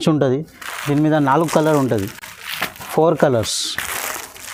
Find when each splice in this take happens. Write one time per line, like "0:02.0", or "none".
none